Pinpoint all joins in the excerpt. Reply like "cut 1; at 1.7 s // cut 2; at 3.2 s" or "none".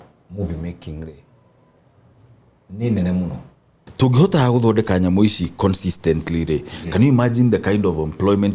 cut 1; at 3.8 s